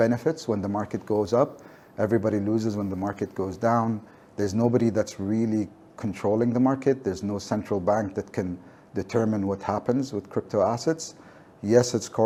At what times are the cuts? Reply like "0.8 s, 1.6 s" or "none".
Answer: none